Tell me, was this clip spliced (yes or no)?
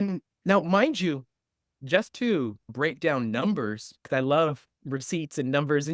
no